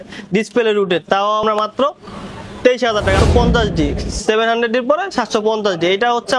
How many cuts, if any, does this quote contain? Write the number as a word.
two